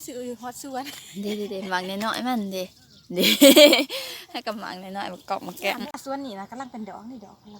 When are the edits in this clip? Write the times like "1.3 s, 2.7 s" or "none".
5.9 s